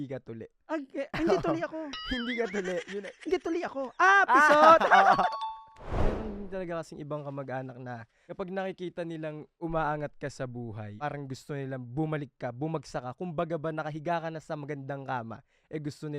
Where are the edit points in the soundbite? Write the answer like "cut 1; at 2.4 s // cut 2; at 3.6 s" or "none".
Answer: cut 1; at 6.0 s // cut 2; at 9.5 s // cut 3; at 10.9 s

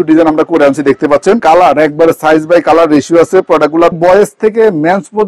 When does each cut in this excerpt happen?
cut 1; at 1.4 s // cut 2; at 4.0 s

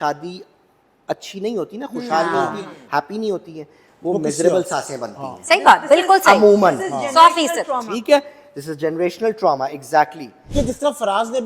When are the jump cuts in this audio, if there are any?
cut 1; at 10.4 s

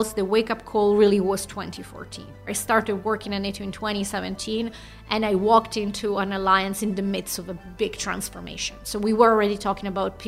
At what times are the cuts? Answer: cut 1; at 2.4 s

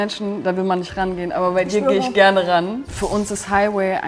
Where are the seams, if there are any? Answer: cut 1; at 2.9 s

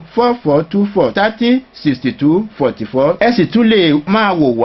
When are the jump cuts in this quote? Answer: cut 1; at 1.0 s

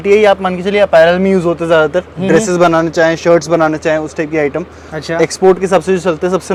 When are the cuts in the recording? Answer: none

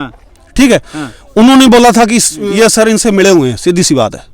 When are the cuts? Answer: cut 1; at 2.3 s

